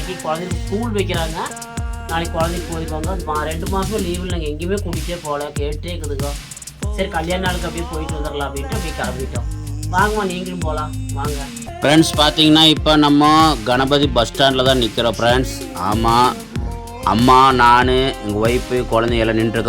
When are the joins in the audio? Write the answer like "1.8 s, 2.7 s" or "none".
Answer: 11.7 s